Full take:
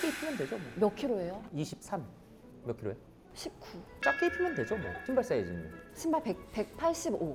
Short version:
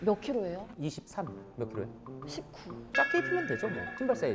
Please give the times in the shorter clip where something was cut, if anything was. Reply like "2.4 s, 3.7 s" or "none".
1.4 s